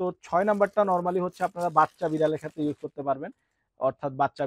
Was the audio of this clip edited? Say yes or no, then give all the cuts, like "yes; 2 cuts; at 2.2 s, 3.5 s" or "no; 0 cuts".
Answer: no; 0 cuts